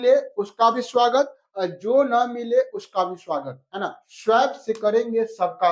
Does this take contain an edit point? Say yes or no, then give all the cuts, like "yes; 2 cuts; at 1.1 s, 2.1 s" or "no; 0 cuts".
no; 0 cuts